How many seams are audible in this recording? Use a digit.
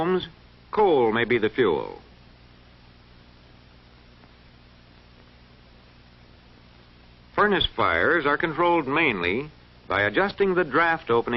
0